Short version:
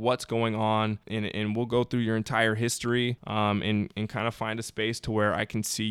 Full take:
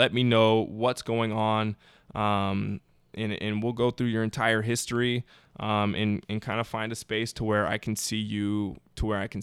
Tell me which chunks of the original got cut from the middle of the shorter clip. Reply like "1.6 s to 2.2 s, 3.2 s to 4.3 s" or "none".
1.8 s to 3.1 s, 5.3 s to 5.5 s